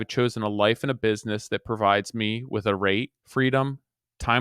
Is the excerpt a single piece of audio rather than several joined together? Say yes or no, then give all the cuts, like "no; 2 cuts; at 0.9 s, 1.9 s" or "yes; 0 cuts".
no; 1 cut; at 3.2 s